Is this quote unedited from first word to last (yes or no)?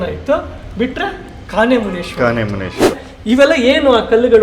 no